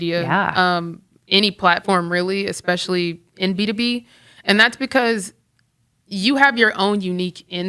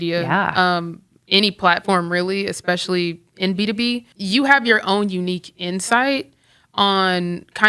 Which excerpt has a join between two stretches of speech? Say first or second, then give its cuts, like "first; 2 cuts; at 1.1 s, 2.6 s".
second; 1 cut; at 4.1 s